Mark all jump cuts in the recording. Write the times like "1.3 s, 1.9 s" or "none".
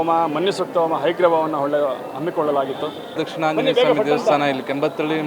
3.2 s